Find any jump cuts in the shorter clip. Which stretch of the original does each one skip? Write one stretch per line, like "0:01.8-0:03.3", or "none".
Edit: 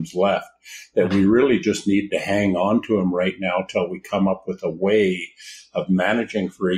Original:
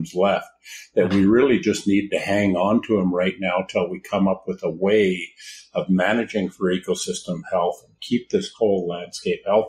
none